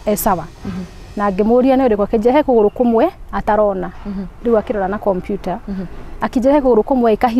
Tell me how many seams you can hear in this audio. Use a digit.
0